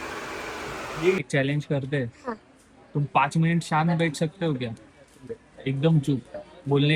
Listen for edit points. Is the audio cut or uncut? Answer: cut